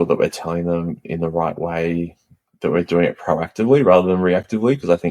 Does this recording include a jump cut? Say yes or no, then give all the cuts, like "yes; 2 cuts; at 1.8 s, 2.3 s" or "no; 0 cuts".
no; 0 cuts